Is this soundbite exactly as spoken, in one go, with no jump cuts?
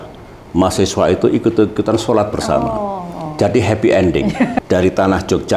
no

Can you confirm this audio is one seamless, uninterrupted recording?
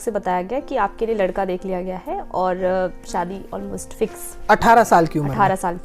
yes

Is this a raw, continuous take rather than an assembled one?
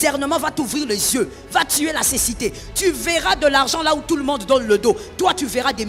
yes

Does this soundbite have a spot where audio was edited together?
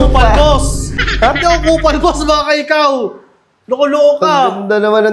no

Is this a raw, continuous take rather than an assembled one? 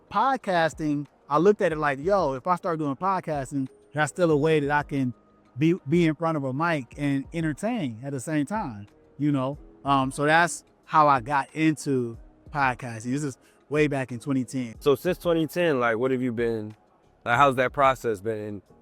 no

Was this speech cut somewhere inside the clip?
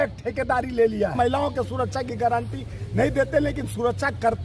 yes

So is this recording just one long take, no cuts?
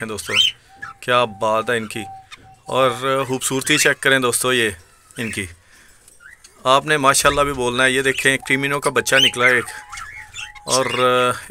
yes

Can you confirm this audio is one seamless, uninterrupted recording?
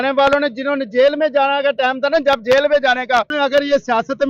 no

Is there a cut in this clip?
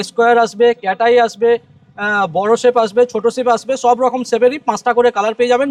no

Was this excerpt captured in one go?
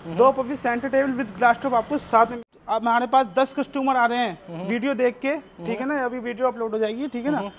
no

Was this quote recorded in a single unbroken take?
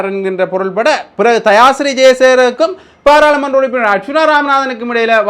yes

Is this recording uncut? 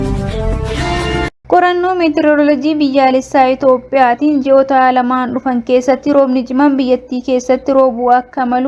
no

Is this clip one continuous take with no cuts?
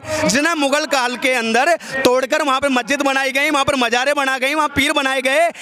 yes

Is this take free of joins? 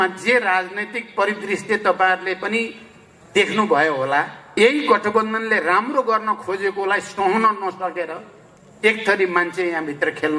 no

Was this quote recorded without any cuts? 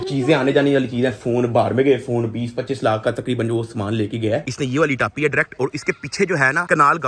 no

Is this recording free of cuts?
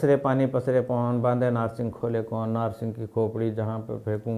yes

